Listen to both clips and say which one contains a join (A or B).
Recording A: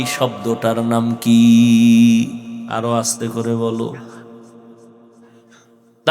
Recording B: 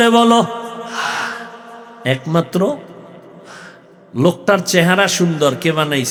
A